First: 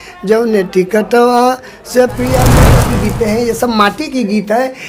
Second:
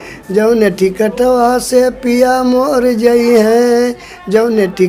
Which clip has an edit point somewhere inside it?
first; 1 cut; at 2.6 s

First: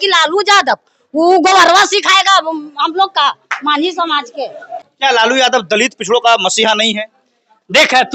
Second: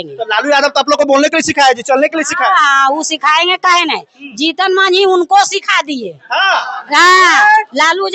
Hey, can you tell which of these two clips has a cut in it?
first; 1 cut; at 4.7 s

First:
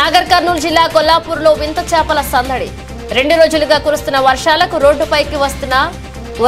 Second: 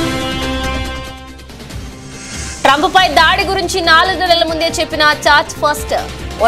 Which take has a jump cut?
second; 2 cuts; at 1.0 s, 2.4 s

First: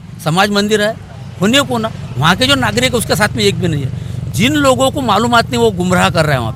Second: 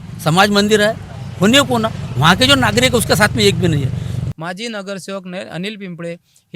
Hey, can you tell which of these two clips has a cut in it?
second; 1 cut; at 4.2 s

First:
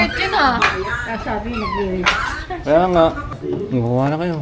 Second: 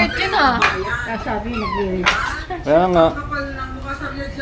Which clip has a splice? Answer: first; 1 cut; at 3.3 s

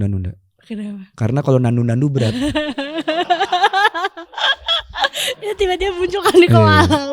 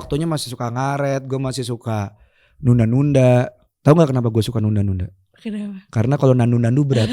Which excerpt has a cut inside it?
second; 1 cut; at 3.6 s

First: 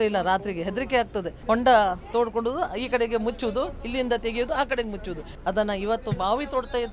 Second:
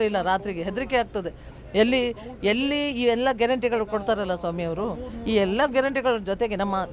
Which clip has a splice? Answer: first; 2 cuts; at 1.3 s, 5.2 s

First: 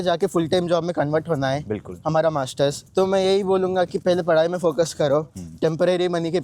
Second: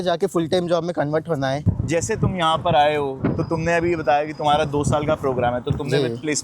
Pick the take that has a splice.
second; 1 cut; at 1.6 s

